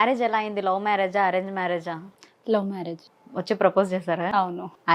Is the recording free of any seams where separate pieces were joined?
no; 1 cut; at 3.1 s

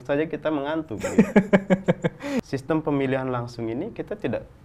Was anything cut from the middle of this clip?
yes; 1 cut; at 2.4 s

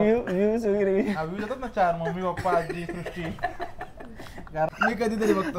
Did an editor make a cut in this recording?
yes; 1 cut; at 4.7 s

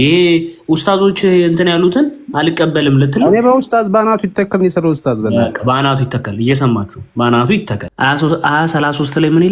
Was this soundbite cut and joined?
yes; 1 cut; at 7.8 s

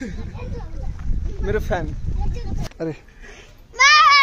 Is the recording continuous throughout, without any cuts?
no; 1 cut; at 2.6 s

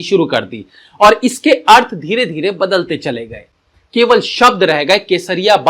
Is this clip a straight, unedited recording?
yes; 0 cuts

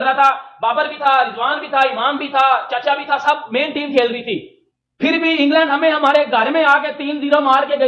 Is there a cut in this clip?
no; 0 cuts

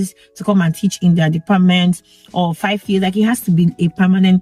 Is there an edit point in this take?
no; 0 cuts

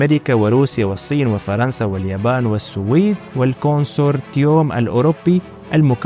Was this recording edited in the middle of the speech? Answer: no; 0 cuts

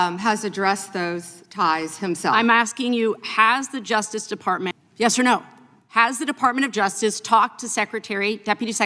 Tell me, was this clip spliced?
yes; 1 cut; at 4.7 s

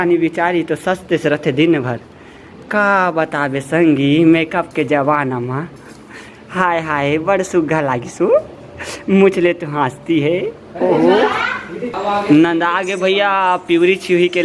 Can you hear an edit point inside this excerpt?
no; 0 cuts

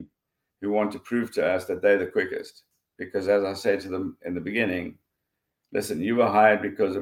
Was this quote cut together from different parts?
no; 0 cuts

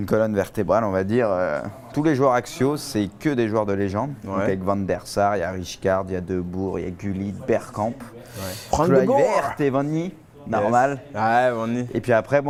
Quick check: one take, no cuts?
yes; 0 cuts

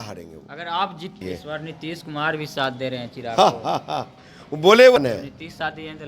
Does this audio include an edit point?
yes; 2 cuts; at 1.2 s, 5.0 s

